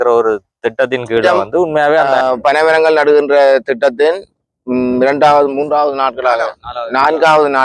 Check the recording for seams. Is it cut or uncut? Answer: cut